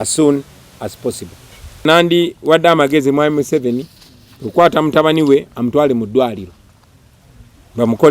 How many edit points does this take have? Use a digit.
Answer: 1